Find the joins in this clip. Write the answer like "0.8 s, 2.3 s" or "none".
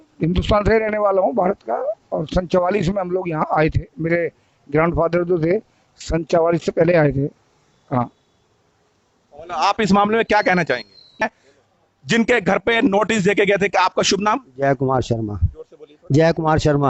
11.2 s

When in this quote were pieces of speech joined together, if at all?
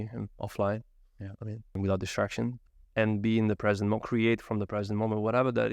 1.8 s, 2.7 s

